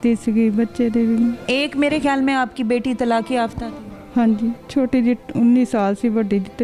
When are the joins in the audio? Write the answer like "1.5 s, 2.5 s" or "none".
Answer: 1.4 s, 4.6 s